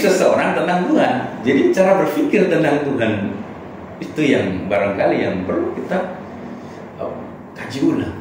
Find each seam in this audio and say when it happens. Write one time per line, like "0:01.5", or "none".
0:01.3